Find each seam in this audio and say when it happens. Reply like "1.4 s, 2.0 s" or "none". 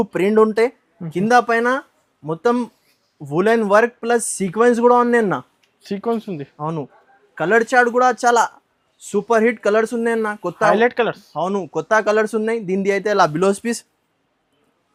none

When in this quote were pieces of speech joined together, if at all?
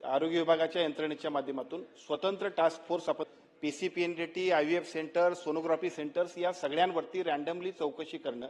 3.3 s

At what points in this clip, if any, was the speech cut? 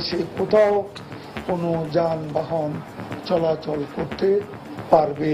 none

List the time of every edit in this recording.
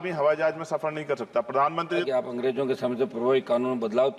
2.0 s

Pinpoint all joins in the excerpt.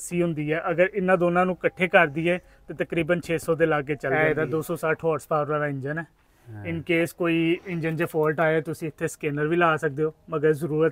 4.1 s

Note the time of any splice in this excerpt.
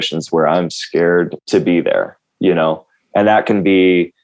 none

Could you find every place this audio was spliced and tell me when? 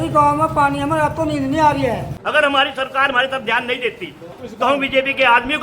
2.1 s, 4.2 s

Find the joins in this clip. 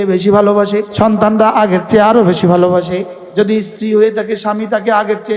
0.9 s, 3.2 s

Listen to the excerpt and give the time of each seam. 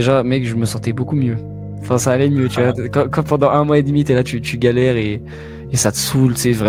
none

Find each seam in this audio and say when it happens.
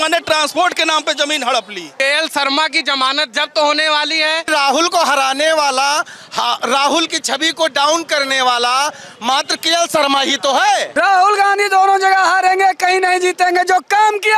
1.8 s, 4.5 s, 10.9 s

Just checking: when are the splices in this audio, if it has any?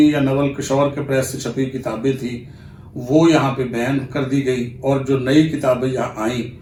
none

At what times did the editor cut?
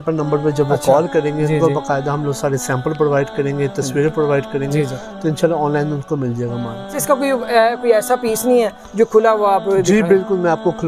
7.0 s

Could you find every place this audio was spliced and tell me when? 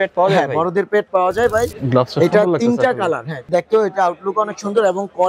1.7 s, 3.4 s

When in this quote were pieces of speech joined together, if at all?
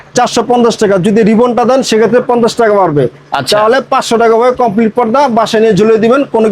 none

